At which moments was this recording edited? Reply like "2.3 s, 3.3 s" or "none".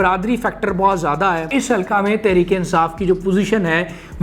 1.5 s